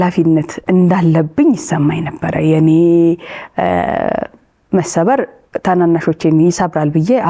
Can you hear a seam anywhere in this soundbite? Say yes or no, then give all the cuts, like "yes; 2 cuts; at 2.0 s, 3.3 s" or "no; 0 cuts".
no; 0 cuts